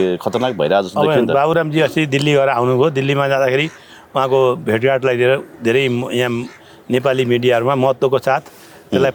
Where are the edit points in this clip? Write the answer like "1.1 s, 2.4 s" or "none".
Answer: none